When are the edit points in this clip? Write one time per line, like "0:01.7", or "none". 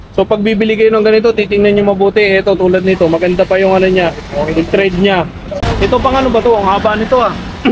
0:05.4